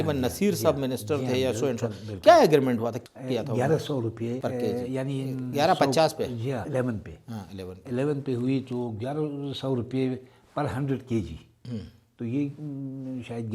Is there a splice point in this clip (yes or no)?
yes